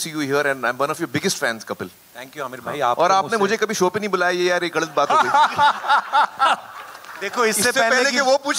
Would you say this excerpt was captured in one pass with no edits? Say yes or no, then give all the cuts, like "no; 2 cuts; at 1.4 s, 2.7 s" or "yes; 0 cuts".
yes; 0 cuts